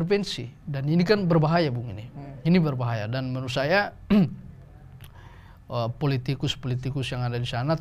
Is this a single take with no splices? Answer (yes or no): yes